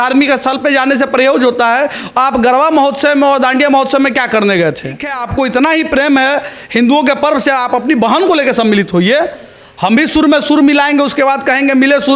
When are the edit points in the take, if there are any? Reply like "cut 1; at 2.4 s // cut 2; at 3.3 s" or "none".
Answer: cut 1; at 5.2 s